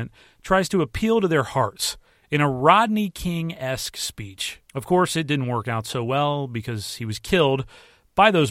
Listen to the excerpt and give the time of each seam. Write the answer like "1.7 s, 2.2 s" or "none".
4.7 s